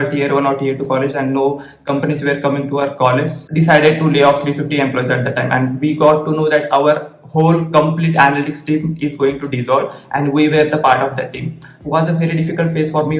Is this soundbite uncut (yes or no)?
no